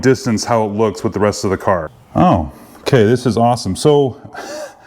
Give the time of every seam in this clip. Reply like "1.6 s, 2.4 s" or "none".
2.0 s